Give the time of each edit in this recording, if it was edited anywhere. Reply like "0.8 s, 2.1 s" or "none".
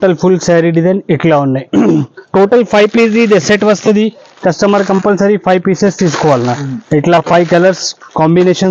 none